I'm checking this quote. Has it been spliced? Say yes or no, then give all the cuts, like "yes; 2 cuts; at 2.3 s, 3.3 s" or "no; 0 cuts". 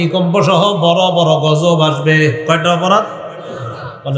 no; 0 cuts